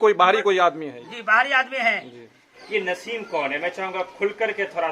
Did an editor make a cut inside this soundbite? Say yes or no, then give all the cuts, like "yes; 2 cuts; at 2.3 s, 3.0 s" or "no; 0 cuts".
yes; 1 cut; at 2.5 s